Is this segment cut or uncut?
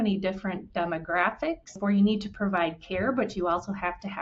cut